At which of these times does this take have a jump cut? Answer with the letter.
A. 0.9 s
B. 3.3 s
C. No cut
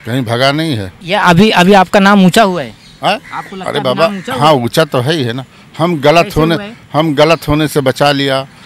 A